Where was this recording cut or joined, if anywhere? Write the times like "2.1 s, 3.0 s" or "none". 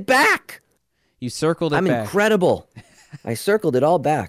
none